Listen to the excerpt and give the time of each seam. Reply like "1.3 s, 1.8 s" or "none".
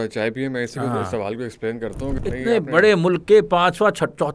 2.2 s